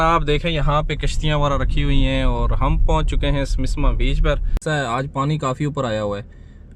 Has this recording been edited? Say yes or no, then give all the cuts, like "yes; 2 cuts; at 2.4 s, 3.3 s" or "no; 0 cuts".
yes; 1 cut; at 4.6 s